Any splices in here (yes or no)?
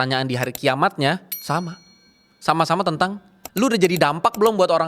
yes